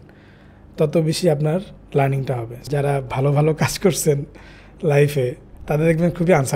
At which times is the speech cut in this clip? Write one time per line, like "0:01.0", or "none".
0:02.6